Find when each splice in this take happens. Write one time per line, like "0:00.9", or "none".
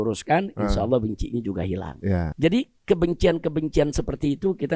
0:02.3